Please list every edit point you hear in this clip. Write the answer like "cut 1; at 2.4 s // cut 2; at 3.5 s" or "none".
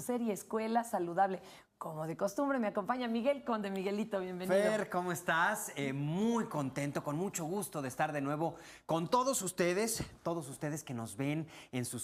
cut 1; at 1.6 s